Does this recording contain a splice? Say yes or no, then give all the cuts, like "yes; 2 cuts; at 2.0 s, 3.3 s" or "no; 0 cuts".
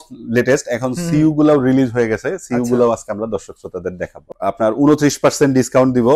yes; 1 cut; at 4.3 s